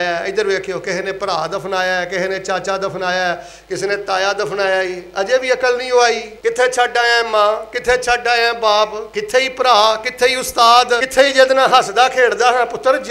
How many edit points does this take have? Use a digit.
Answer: 2